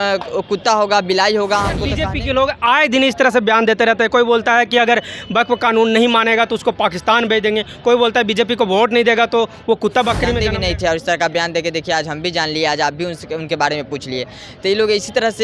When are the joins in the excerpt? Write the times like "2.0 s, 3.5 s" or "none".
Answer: 1.9 s, 10.4 s